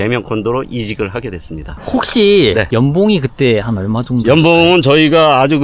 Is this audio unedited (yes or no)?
no